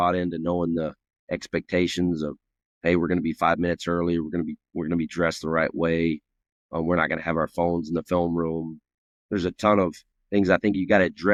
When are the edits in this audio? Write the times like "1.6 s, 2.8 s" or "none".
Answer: none